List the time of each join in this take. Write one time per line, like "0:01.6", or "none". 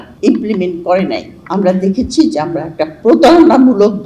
0:01.4